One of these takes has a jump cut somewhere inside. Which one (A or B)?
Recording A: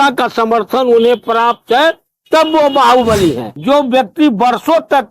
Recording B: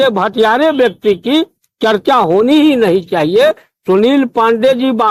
A